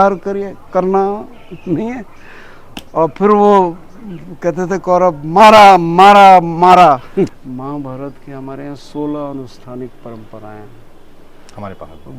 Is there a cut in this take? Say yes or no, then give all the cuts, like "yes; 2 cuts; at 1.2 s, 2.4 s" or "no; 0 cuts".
yes; 1 cut; at 7.3 s